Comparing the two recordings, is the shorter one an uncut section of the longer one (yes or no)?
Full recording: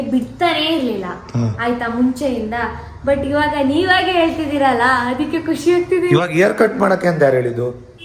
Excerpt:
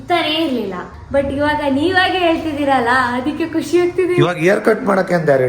no